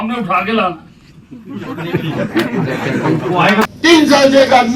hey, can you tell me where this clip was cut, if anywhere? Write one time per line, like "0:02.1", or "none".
0:03.7